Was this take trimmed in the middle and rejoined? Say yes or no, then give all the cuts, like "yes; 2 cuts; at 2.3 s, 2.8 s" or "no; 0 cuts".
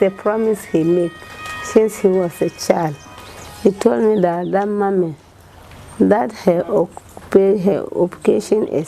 no; 0 cuts